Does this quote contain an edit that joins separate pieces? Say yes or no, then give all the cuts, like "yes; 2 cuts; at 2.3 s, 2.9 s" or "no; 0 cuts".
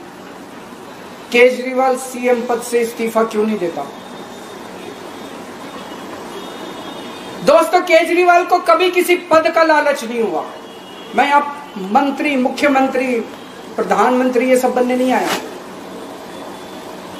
no; 0 cuts